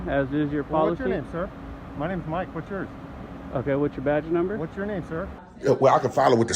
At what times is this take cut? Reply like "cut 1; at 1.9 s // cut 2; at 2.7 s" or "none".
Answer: cut 1; at 5.4 s